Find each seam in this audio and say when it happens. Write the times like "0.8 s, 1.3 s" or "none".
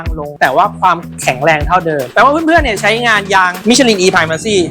2.1 s